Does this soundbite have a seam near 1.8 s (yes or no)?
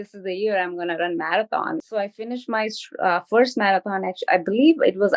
yes